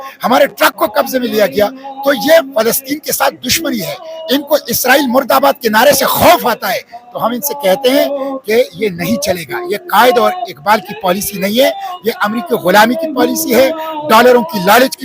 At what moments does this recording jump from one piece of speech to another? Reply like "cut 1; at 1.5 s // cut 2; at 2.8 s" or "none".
none